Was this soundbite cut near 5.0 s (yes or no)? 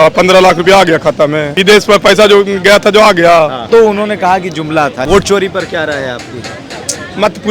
yes